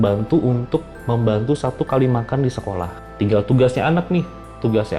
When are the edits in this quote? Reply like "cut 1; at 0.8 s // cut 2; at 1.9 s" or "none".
cut 1; at 3.0 s